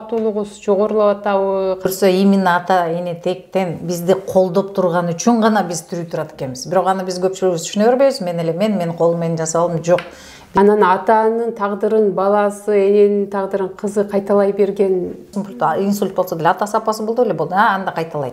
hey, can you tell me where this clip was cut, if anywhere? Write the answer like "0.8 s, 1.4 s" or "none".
1.9 s, 10.6 s, 15.4 s